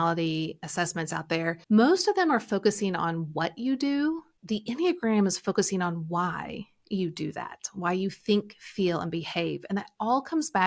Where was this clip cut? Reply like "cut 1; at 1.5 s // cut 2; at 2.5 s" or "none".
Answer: cut 1; at 1.6 s // cut 2; at 4.3 s